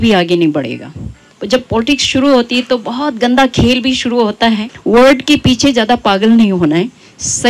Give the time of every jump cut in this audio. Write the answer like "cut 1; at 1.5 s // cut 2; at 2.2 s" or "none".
cut 1; at 1.3 s // cut 2; at 4.7 s